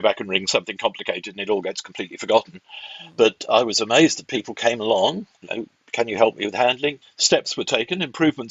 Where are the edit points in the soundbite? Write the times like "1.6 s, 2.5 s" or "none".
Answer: 7.0 s